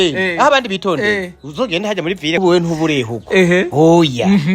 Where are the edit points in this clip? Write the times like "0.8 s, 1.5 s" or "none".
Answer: 2.4 s

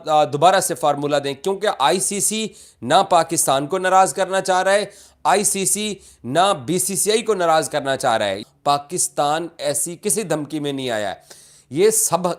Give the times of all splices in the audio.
8.4 s

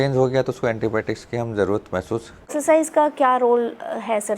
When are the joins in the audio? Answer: 2.4 s

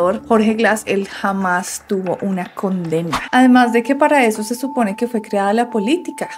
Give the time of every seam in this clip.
3.2 s

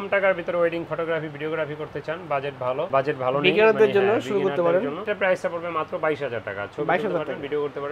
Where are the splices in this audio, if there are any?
none

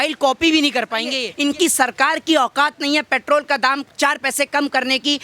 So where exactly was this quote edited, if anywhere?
1.3 s

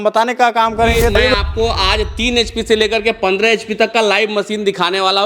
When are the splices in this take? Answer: 1.3 s

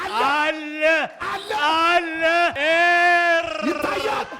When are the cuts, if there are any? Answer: 2.6 s

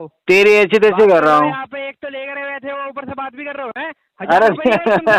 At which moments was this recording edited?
none

